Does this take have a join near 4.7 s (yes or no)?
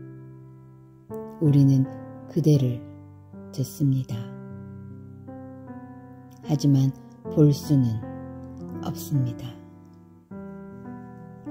no